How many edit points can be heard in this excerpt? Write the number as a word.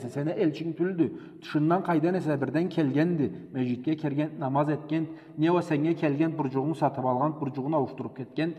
zero